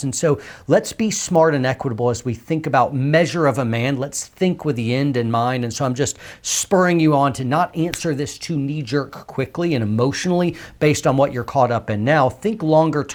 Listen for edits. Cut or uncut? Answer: uncut